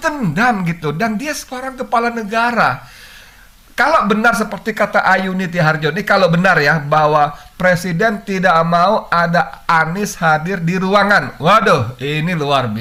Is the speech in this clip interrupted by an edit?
no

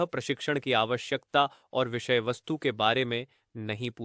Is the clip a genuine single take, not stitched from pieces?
yes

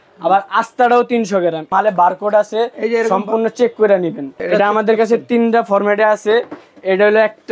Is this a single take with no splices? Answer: no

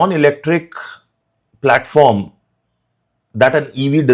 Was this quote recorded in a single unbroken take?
yes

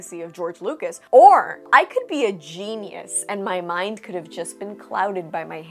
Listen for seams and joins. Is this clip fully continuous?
no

